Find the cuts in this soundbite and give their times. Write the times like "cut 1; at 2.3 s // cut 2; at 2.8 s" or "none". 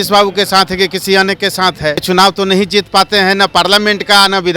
cut 1; at 2.0 s